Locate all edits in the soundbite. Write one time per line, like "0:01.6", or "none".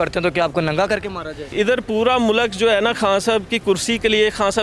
0:01.5